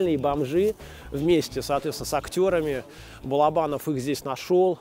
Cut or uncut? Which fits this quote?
uncut